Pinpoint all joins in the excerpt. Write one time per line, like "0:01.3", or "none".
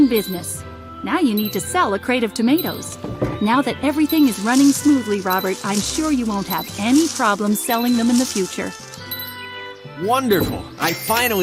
none